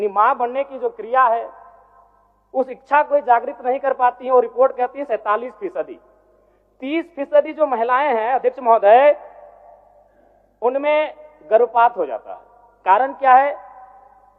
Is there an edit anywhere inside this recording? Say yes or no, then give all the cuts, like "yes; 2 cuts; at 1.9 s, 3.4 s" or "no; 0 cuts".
no; 0 cuts